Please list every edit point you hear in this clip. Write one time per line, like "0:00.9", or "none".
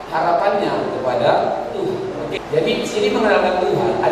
0:02.3